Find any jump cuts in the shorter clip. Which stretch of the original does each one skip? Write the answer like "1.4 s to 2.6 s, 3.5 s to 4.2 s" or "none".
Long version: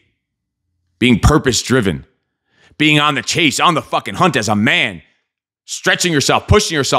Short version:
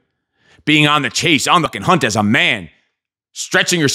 3.8 s to 4.0 s